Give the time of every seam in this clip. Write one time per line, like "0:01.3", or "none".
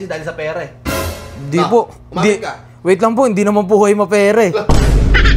none